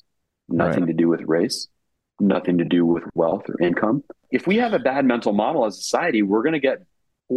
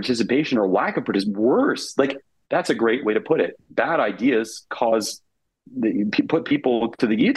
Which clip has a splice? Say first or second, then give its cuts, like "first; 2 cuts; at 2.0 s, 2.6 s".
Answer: first; 1 cut; at 4.2 s